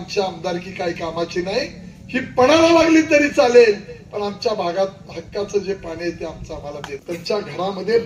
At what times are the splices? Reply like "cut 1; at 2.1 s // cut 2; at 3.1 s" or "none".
cut 1; at 7.0 s